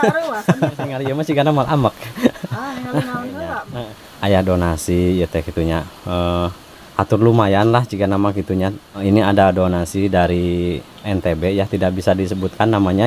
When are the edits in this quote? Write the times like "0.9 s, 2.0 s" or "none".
1.1 s, 3.6 s, 9.0 s